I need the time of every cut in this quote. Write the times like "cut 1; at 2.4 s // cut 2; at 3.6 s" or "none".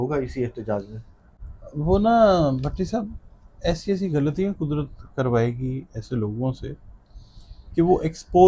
none